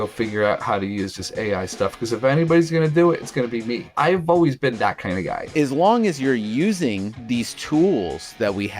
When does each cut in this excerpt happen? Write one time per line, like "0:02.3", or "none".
0:05.5